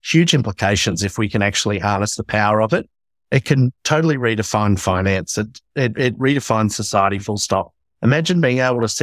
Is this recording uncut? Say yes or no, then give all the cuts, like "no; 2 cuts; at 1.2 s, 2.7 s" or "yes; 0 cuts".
yes; 0 cuts